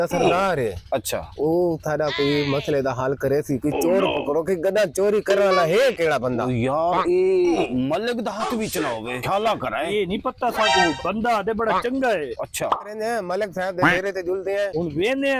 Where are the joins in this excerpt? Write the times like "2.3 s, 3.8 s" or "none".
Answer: none